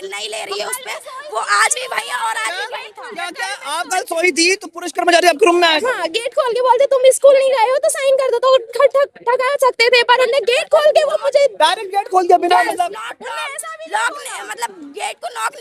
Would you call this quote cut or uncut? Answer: uncut